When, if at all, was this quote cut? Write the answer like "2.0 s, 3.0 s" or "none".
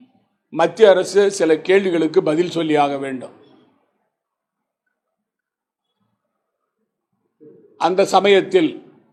none